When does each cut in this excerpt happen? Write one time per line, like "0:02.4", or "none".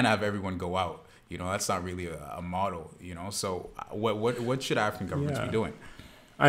none